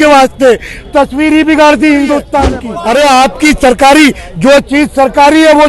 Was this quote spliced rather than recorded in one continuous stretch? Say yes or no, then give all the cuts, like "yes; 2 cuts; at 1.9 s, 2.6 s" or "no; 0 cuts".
yes; 1 cut; at 2.7 s